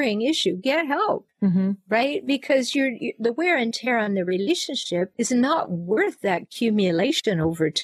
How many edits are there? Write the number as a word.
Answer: zero